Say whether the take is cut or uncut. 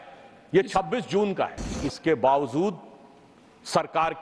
cut